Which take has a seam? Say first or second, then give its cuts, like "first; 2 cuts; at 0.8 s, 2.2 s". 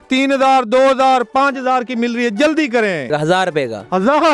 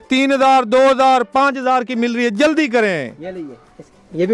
first; 1 cut; at 3.1 s